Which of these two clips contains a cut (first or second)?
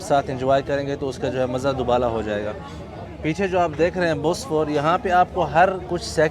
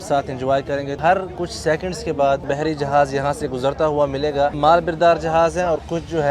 second